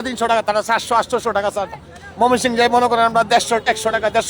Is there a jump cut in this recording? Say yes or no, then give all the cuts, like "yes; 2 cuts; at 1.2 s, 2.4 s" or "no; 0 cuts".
no; 0 cuts